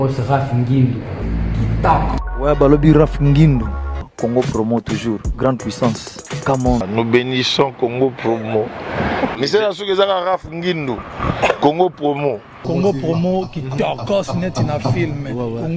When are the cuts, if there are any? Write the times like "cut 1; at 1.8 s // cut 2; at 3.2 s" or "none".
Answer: cut 1; at 1.2 s // cut 2; at 2.2 s

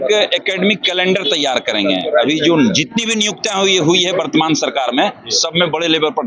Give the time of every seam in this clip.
none

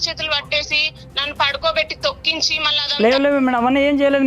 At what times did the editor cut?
cut 1; at 2.6 s

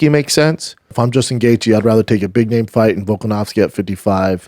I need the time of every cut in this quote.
cut 1; at 1.0 s

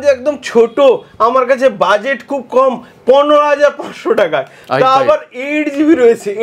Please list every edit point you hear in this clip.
none

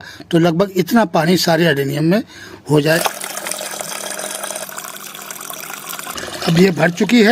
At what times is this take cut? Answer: cut 1; at 3.0 s // cut 2; at 6.1 s

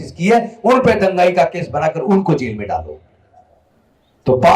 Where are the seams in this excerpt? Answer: none

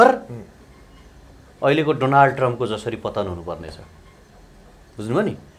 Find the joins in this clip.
none

